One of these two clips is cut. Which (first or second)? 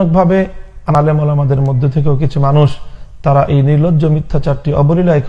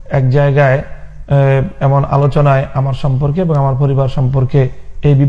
first